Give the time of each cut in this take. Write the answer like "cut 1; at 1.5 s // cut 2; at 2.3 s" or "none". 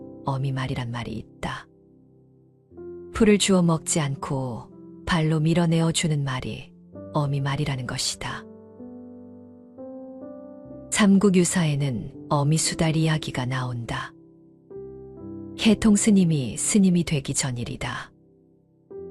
none